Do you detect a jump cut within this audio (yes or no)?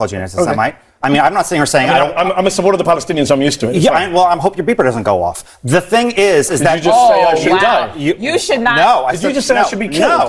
no